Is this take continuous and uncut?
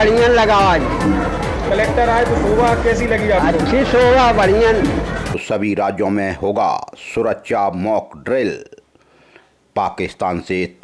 no; 1 cut; at 5.4 s

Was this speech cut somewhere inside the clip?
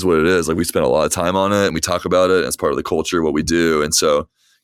no; 0 cuts

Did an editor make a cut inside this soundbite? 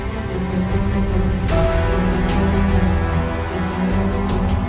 no; 0 cuts

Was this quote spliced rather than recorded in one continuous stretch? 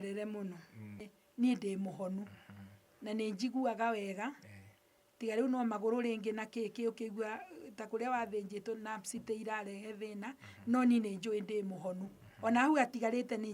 yes; 1 cut; at 1.2 s

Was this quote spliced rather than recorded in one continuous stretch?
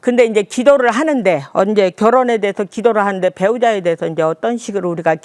no; 0 cuts

